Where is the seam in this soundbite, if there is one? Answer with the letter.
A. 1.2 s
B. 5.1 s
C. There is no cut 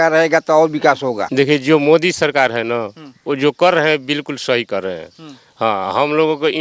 A